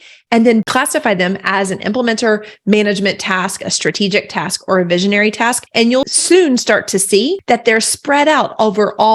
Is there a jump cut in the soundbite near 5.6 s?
yes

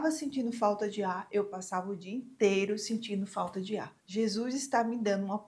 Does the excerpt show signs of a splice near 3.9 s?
yes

